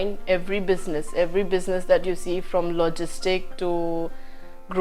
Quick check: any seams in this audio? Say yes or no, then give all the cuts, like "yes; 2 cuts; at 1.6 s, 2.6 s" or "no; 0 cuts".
no; 0 cuts